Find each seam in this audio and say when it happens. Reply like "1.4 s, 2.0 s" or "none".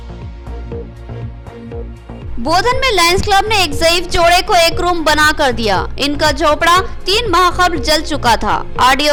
none